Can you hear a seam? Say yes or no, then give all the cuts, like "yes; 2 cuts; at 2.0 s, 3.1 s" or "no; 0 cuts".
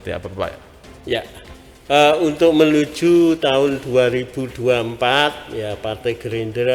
no; 0 cuts